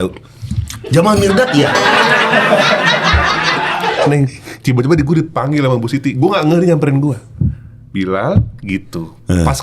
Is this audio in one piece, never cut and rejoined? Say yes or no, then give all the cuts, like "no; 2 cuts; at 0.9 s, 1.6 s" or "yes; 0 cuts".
no; 1 cut; at 4.1 s